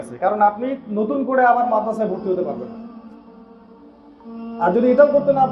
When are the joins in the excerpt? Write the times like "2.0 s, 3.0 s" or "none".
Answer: none